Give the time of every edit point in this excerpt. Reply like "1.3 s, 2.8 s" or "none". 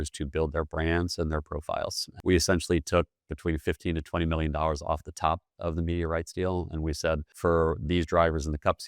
2.1 s, 7.3 s